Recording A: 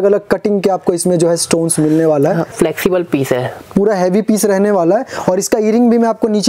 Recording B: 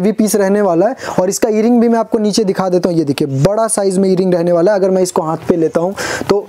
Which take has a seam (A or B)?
A